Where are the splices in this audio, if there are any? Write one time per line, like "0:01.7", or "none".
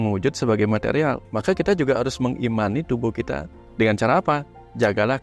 0:01.3
0:03.6